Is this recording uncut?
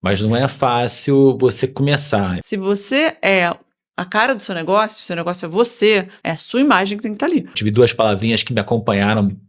no; 3 cuts; at 2.4 s, 6.2 s, 7.6 s

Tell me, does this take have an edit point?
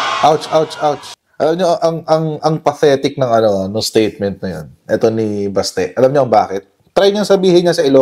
yes; 1 cut; at 1.2 s

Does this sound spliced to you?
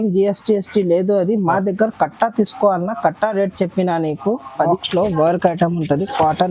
yes; 1 cut; at 4.7 s

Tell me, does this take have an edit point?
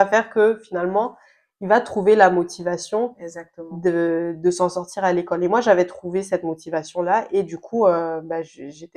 no; 0 cuts

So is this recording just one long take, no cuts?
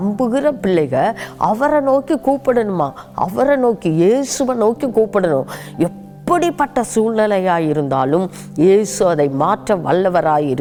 yes; 0 cuts

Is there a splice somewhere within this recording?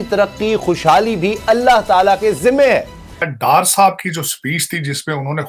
yes; 1 cut; at 3.3 s

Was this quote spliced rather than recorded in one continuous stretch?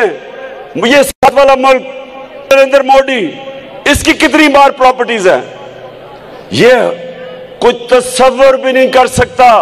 yes; 1 cut; at 2.5 s

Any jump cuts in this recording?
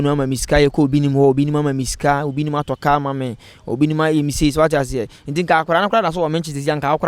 no; 0 cuts

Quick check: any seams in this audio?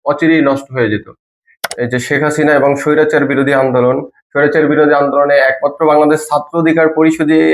yes; 1 cut; at 1.6 s

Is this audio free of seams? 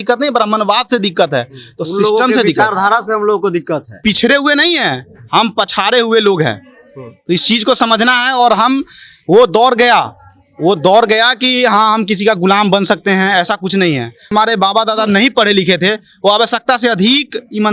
no; 2 cuts; at 3.9 s, 14.3 s

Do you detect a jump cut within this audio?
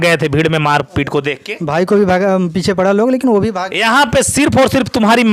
no; 0 cuts

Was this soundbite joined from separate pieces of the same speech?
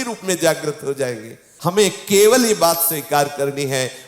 yes; 1 cut; at 1.5 s

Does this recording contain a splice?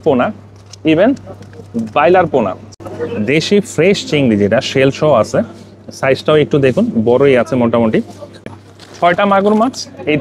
yes; 2 cuts; at 2.6 s, 8.5 s

